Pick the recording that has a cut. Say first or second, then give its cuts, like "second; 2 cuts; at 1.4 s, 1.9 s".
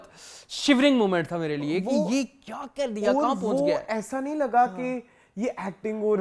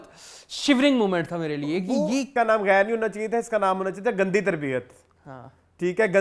second; 1 cut; at 2.3 s